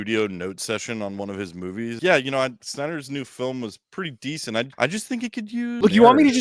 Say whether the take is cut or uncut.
cut